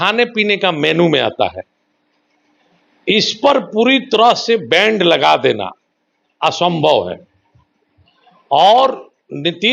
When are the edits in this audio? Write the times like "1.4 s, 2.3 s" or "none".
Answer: none